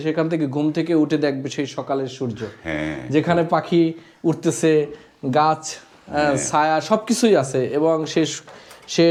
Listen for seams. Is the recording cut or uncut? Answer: uncut